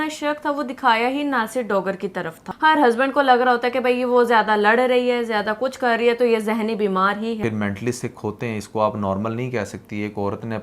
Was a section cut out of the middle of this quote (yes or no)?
yes